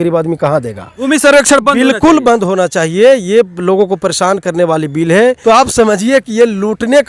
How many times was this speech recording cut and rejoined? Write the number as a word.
two